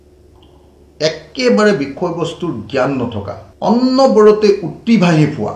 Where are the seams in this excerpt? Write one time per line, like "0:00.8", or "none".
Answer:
0:03.4

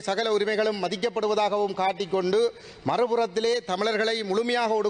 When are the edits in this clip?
none

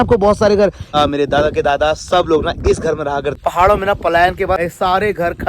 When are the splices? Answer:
0:01.0
0:03.4
0:04.6

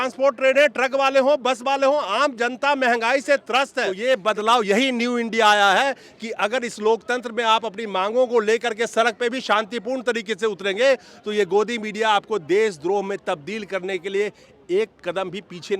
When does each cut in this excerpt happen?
0:03.9

